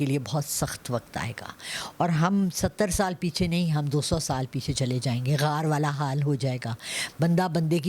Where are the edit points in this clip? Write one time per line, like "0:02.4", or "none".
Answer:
none